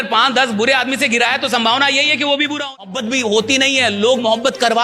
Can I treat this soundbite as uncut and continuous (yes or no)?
no